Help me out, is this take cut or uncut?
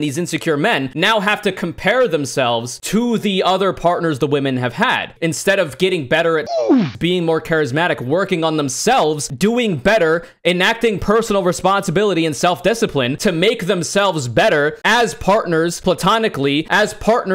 uncut